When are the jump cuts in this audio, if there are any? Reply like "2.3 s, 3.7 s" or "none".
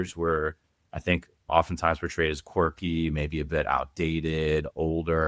1.5 s